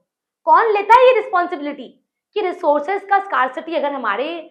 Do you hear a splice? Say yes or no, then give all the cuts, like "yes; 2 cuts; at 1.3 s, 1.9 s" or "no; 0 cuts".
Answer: no; 0 cuts